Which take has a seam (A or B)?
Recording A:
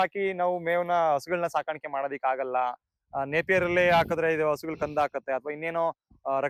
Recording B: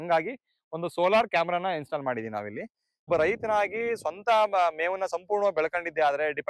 B